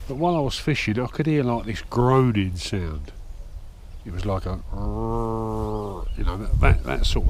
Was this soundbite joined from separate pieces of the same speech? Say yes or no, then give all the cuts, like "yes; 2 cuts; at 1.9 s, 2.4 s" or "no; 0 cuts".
no; 0 cuts